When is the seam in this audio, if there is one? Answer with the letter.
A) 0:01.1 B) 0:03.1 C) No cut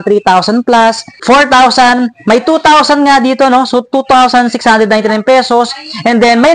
A